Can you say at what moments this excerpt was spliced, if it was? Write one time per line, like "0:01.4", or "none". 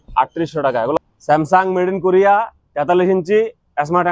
0:01.0